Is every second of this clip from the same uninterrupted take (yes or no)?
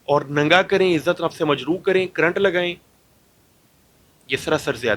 yes